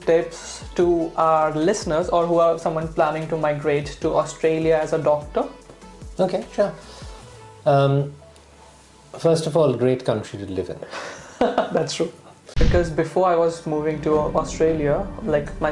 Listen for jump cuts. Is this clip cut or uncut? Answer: cut